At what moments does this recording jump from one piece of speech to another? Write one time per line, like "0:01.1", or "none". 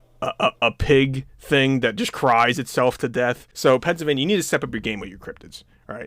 0:03.5